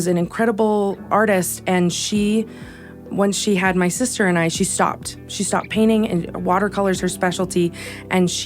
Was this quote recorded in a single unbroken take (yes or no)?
no